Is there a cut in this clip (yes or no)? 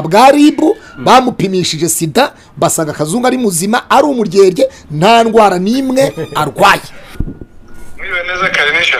yes